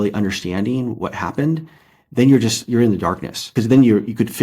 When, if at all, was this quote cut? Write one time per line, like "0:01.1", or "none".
0:03.5